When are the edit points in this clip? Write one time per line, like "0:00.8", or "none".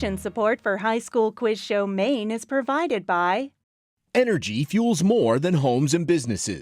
0:03.9